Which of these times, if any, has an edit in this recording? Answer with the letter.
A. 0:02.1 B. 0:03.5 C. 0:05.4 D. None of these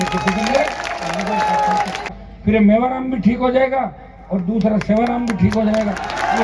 A